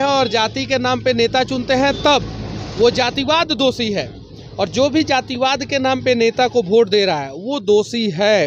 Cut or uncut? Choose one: uncut